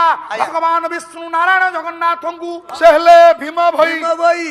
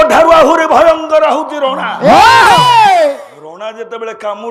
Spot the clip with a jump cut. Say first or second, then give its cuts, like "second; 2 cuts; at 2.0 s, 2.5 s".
first; 1 cut; at 2.7 s